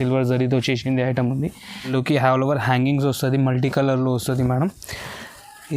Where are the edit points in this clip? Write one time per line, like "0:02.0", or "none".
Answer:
0:01.9